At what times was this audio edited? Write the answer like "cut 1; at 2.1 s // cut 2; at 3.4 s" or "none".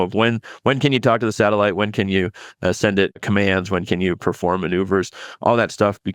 cut 1; at 3.2 s